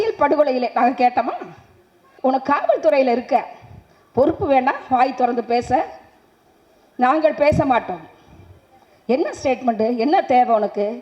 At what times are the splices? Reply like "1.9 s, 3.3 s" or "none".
2.0 s